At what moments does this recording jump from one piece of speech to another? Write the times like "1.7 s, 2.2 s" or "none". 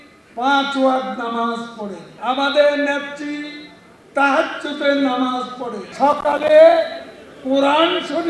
2.1 s, 5.8 s